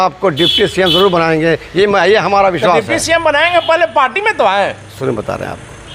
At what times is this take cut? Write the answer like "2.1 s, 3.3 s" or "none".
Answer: none

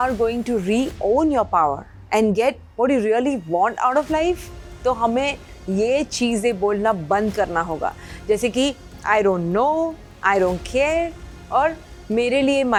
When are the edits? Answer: none

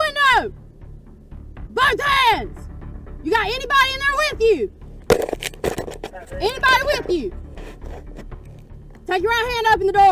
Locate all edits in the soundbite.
none

